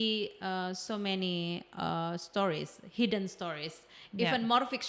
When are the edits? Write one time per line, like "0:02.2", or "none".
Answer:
none